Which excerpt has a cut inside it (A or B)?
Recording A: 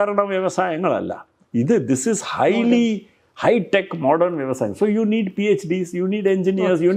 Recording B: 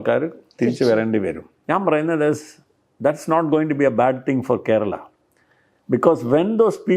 B